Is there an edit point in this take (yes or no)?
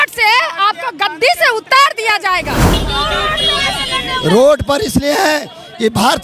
yes